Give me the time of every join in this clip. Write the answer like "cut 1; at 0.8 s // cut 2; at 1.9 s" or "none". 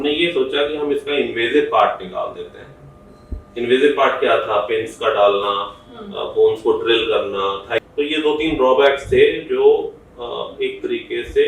cut 1; at 7.8 s